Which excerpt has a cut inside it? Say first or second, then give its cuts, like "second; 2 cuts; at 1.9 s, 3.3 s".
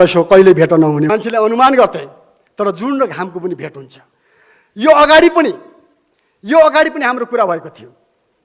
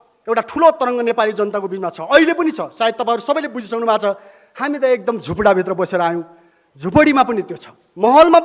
first; 1 cut; at 1.1 s